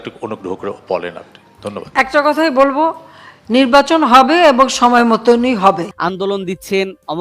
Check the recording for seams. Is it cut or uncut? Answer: cut